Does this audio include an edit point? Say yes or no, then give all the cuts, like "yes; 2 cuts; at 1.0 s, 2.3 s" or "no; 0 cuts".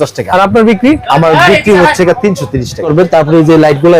yes; 1 cut; at 2.9 s